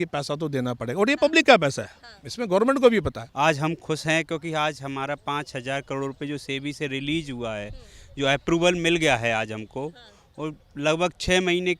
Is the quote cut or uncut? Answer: cut